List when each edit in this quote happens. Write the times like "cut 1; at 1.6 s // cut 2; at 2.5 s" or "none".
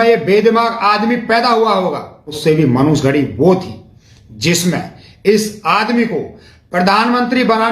cut 1; at 2.4 s